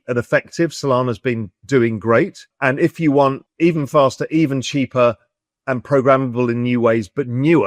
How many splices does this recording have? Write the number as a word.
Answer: three